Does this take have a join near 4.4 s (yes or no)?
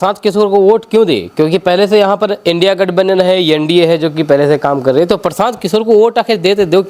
no